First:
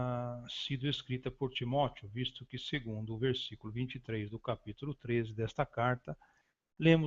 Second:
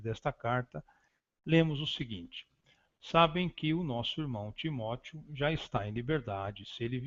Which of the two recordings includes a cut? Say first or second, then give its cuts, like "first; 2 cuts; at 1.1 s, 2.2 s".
first; 1 cut; at 1.0 s